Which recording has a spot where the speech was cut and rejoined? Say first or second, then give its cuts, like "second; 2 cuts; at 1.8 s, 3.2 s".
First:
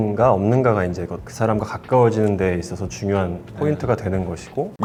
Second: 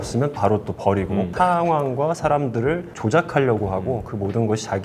second; 1 cut; at 1.3 s